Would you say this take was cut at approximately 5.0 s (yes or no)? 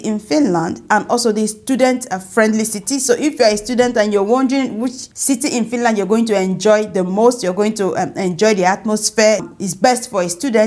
yes